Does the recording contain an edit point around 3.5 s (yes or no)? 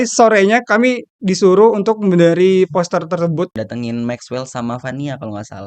yes